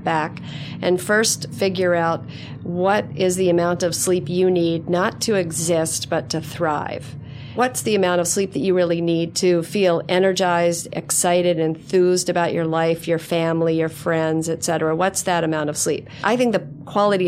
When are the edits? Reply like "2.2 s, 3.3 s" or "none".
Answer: 7.6 s, 9.3 s, 16.2 s